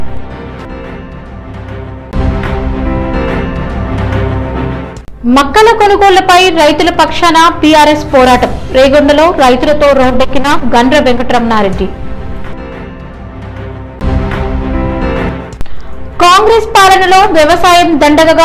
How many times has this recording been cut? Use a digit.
1